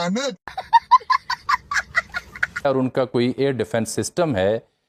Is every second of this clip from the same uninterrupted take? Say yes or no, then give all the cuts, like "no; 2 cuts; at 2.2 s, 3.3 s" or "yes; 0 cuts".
yes; 0 cuts